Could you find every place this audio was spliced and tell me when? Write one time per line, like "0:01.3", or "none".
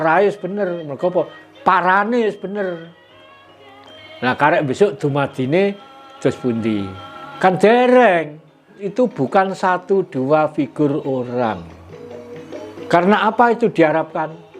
0:08.8